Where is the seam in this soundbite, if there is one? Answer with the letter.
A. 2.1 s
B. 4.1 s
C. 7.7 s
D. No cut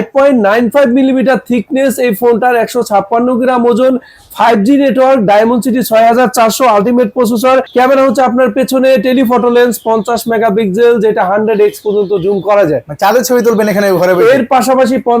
C